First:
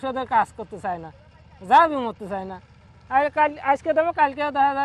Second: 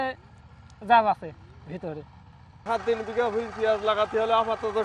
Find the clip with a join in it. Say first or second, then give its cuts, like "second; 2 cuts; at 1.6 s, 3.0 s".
second; 1 cut; at 2.6 s